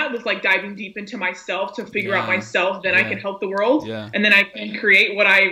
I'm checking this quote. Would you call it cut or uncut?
uncut